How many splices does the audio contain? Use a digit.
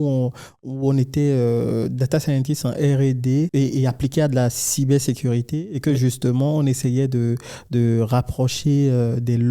1